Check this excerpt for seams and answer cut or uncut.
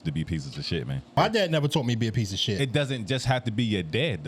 cut